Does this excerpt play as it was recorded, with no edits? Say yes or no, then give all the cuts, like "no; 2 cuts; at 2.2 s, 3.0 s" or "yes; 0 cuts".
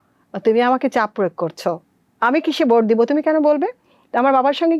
yes; 0 cuts